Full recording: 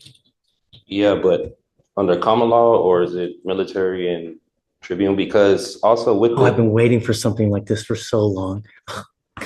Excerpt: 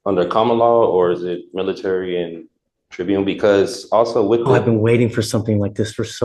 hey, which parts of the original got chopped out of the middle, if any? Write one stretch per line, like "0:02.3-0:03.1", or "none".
none

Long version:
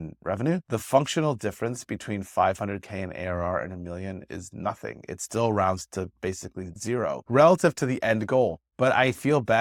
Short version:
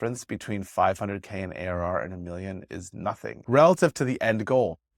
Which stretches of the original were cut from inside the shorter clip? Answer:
0:05.0-0:07.2

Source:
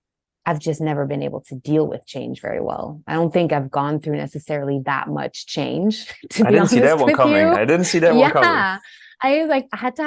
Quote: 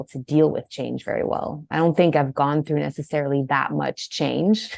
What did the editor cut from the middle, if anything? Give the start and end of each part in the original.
none

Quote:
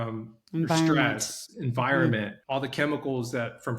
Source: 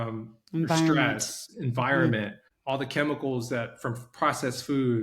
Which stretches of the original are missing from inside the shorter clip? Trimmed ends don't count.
0:02.4-0:02.5

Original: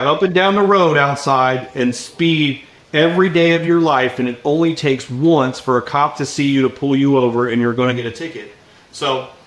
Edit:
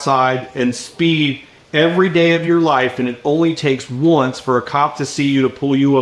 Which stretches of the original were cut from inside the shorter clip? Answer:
none

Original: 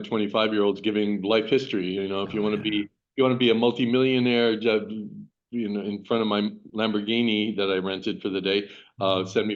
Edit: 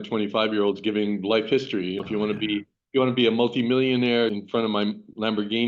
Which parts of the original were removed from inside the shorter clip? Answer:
0:02.0-0:02.3
0:04.6-0:05.9

